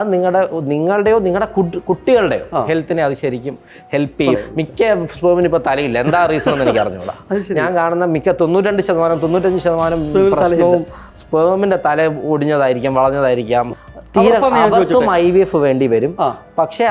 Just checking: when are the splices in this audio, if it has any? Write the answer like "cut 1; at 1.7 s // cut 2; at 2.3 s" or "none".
cut 1; at 4.4 s // cut 2; at 13.7 s